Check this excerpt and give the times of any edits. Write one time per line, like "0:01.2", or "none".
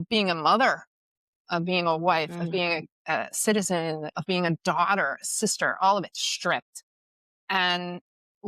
0:04.1